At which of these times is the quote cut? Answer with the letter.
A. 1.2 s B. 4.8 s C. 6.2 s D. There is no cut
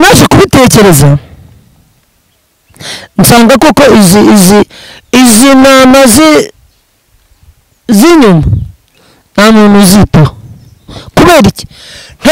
D